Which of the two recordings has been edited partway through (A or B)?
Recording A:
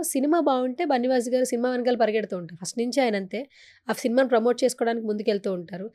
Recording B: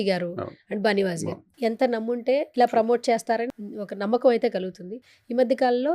B